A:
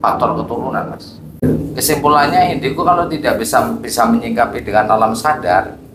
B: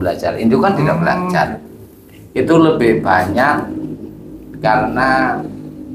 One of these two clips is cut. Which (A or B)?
A